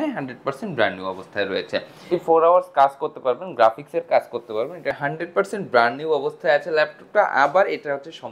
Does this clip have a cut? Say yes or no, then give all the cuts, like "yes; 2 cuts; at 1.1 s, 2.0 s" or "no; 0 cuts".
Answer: yes; 2 cuts; at 2.0 s, 5.0 s